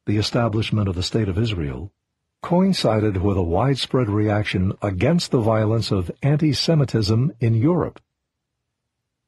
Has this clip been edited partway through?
yes; 1 cut; at 5.8 s

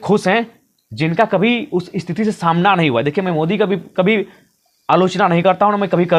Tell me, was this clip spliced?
no; 0 cuts

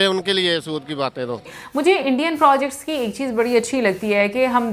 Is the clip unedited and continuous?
no; 1 cut; at 1.6 s

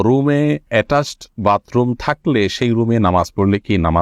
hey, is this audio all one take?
yes; 0 cuts

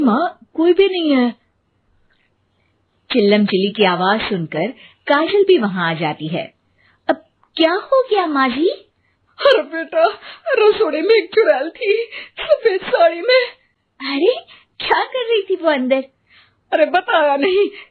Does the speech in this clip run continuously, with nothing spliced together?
yes; 0 cuts

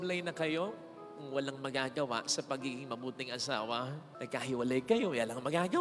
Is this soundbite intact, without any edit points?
yes; 0 cuts

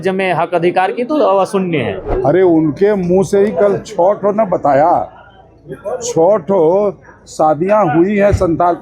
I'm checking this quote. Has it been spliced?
yes; 1 cut; at 2.1 s

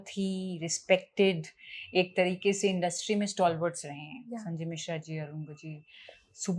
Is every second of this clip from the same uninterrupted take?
yes; 0 cuts

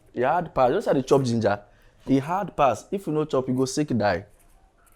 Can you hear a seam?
no; 0 cuts

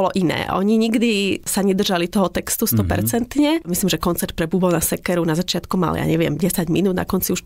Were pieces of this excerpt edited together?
yes; 2 cuts; at 1.5 s, 3.7 s

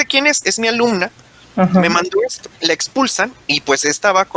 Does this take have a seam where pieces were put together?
yes; 1 cut; at 2.6 s

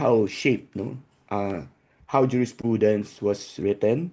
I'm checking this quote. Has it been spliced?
no; 0 cuts

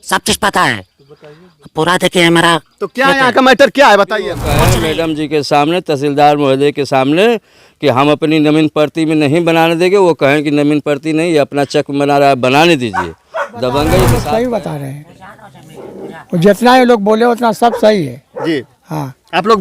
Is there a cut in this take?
yes; 2 cuts; at 4.7 s, 14.1 s

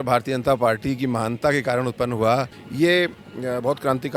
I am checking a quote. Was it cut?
yes; 1 cut; at 2.6 s

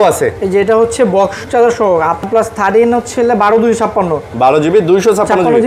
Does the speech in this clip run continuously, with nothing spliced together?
no; 1 cut; at 2.2 s

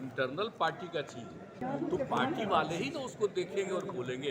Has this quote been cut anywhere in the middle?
yes; 1 cut; at 1.6 s

